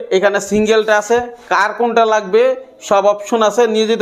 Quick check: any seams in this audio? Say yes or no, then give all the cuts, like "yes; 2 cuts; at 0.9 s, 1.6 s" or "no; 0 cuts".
no; 0 cuts